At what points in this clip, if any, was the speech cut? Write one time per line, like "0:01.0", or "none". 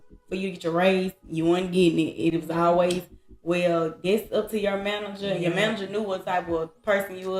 none